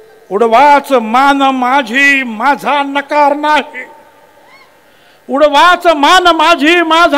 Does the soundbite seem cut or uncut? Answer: uncut